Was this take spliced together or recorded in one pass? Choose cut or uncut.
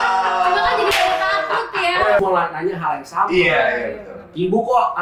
cut